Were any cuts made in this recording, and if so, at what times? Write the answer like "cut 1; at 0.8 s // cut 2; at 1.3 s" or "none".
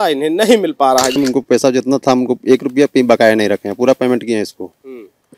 cut 1; at 1.2 s

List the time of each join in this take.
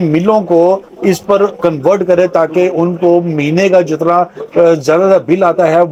none

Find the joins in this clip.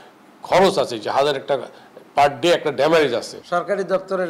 cut 1; at 3.3 s

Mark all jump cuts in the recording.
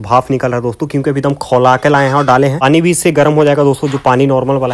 none

